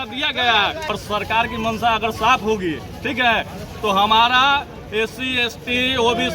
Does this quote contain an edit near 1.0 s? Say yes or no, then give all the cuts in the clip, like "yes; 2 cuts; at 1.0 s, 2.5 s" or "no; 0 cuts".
yes; 1 cut; at 1.0 s